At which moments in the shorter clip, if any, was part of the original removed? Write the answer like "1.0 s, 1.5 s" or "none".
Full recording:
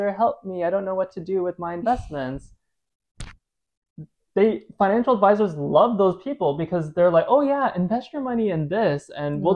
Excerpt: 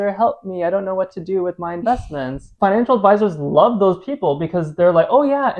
2.5 s